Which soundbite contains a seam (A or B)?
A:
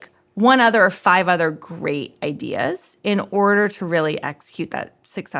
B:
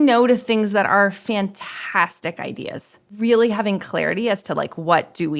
B